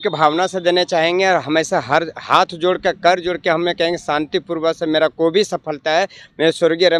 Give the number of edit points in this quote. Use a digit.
0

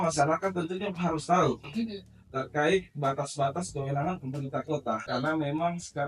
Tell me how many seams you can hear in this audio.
1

